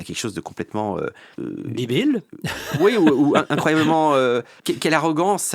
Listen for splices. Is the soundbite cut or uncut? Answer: cut